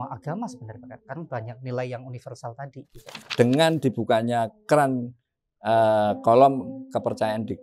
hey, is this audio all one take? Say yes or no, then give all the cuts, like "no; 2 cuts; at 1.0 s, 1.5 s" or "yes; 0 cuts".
no; 1 cut; at 3.2 s